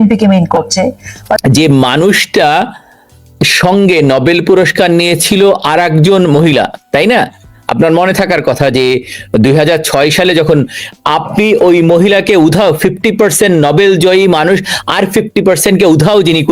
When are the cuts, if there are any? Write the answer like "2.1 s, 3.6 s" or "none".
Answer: 1.4 s